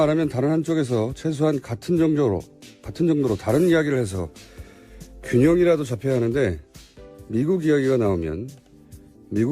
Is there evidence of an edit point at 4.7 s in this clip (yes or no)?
no